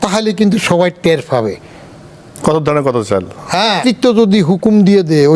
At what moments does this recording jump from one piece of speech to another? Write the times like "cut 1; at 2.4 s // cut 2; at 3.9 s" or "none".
cut 1; at 3.8 s